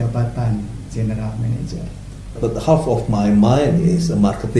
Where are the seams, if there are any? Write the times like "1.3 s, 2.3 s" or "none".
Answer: 2.4 s